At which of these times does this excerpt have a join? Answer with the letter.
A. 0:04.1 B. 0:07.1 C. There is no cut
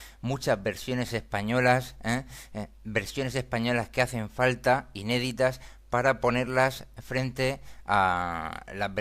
A